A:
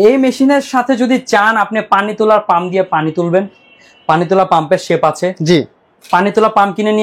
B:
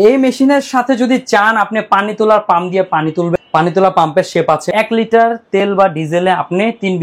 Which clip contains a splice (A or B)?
B